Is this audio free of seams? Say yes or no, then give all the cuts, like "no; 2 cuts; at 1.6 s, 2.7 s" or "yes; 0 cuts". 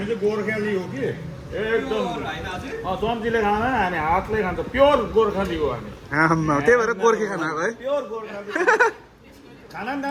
yes; 0 cuts